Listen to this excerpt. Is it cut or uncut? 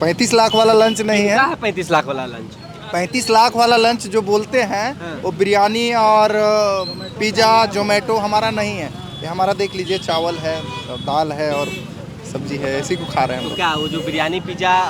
uncut